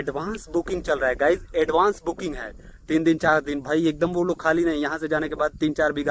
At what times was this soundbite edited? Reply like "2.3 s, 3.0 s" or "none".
none